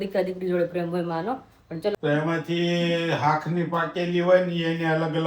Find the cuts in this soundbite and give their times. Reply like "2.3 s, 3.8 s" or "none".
1.9 s